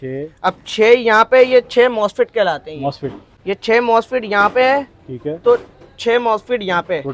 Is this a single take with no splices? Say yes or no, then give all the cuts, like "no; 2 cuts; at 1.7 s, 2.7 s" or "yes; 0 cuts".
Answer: yes; 0 cuts